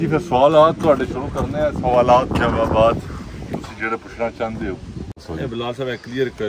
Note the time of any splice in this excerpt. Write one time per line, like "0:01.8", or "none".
0:05.2